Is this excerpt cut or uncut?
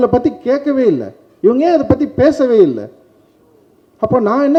uncut